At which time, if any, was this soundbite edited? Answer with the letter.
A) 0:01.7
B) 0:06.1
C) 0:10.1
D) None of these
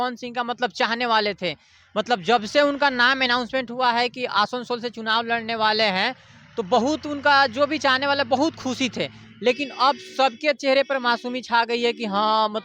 D